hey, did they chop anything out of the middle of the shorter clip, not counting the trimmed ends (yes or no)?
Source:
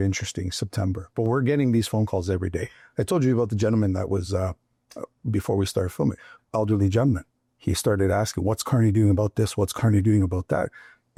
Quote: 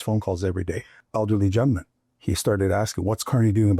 yes